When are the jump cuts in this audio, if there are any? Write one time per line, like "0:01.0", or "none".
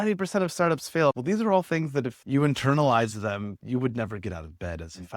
0:01.2
0:03.6